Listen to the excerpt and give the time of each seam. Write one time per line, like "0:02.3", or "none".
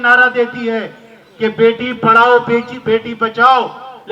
none

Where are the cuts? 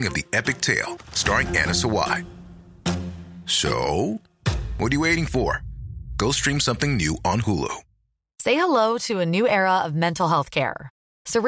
0:08.3

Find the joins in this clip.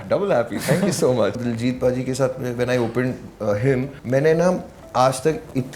0:01.4
0:04.0

